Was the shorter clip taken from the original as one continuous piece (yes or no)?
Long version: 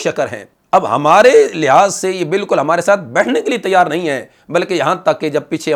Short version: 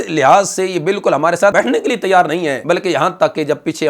no